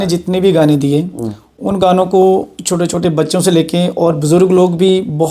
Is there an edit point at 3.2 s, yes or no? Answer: no